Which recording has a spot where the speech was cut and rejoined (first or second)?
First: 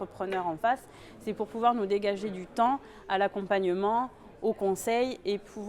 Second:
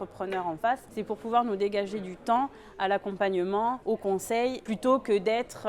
second